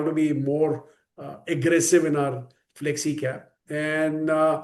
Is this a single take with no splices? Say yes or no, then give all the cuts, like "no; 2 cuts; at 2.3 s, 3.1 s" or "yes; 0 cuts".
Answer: yes; 0 cuts